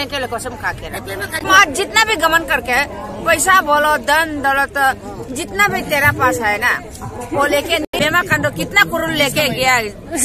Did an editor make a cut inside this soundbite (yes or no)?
yes